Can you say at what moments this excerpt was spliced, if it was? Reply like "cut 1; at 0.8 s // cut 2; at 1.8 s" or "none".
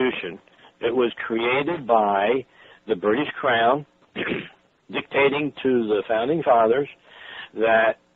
cut 1; at 2.7 s